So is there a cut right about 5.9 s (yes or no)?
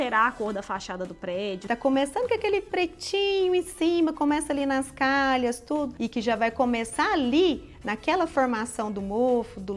yes